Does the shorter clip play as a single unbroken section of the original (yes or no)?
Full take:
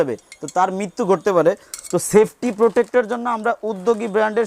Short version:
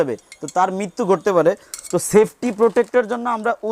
yes